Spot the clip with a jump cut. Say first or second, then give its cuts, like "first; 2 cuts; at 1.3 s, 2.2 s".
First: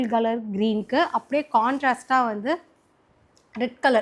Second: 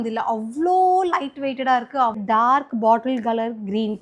second; 1 cut; at 2.2 s